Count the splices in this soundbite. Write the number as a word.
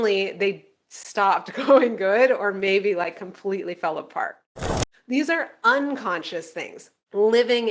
one